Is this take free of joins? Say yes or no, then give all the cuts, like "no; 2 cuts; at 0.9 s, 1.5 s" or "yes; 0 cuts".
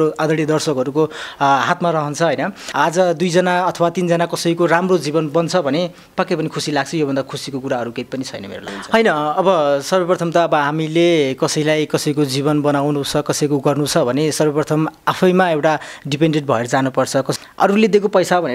no; 3 cuts; at 2.6 s, 8.7 s, 17.3 s